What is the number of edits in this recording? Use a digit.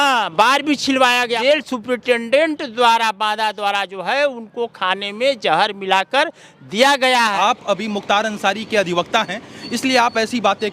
2